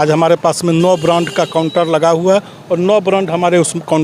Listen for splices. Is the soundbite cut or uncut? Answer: uncut